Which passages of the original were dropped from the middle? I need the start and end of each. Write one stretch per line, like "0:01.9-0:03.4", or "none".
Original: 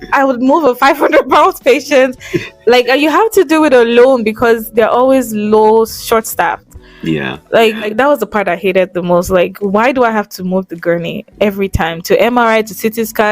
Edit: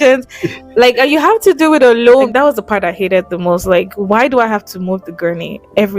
0:04.2-0:07.9